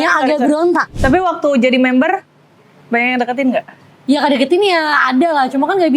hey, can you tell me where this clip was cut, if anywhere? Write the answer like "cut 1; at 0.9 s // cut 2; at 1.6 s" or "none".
cut 1; at 0.9 s